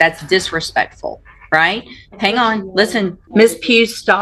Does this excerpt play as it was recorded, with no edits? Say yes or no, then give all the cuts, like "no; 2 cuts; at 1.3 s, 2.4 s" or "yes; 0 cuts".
no; 1 cut; at 3.2 s